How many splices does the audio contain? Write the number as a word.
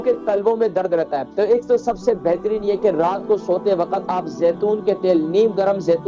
one